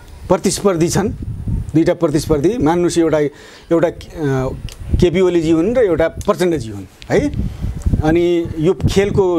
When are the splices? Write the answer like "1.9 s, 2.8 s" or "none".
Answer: none